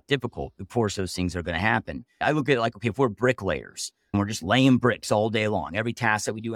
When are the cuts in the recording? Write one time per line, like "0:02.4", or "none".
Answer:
0:02.1
0:04.1